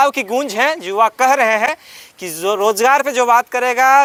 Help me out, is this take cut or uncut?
uncut